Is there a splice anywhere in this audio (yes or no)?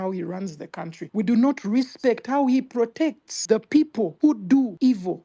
yes